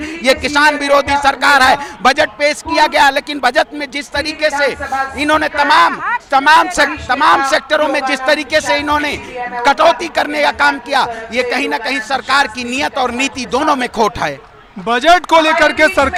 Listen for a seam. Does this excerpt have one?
no; 0 cuts

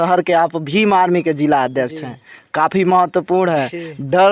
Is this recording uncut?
yes; 0 cuts

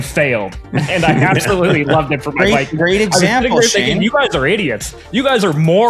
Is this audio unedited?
yes; 0 cuts

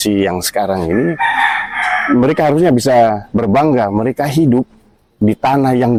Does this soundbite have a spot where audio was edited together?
no; 0 cuts

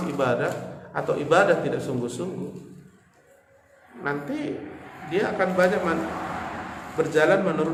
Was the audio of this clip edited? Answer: no; 0 cuts

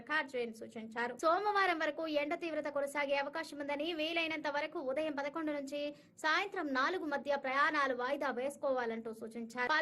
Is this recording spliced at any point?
yes; 1 cut; at 8.7 s

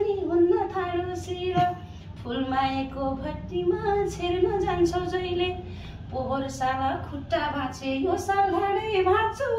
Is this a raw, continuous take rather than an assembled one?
yes; 0 cuts

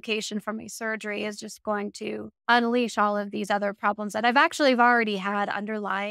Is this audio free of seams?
no; 1 cut; at 2.3 s

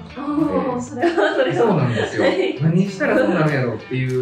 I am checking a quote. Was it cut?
yes; 1 cut; at 2.6 s

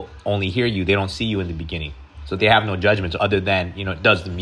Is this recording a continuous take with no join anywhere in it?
yes; 0 cuts

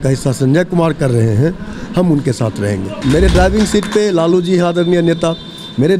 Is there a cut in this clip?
yes; 1 cut; at 2.9 s

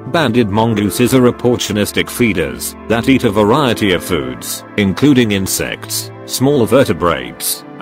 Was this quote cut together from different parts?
yes; 2 cuts; at 0.9 s, 3.0 s

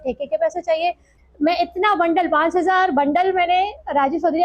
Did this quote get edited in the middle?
yes; 1 cut; at 1.1 s

